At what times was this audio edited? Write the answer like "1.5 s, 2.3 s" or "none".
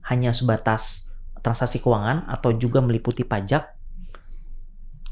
none